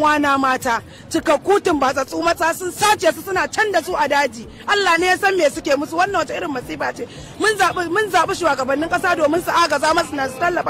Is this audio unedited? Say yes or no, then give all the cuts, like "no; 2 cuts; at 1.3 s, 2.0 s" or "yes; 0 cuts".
yes; 0 cuts